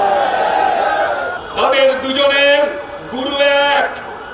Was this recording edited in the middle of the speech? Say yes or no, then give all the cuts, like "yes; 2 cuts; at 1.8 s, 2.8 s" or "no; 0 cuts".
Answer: yes; 1 cut; at 1.4 s